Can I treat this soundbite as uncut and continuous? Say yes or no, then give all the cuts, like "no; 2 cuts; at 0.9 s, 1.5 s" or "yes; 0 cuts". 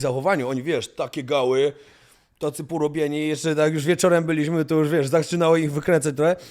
yes; 0 cuts